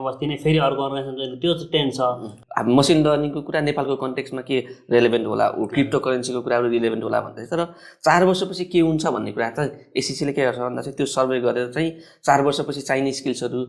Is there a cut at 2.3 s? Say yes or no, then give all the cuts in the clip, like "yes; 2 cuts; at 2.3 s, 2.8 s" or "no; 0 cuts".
yes; 1 cut; at 2.3 s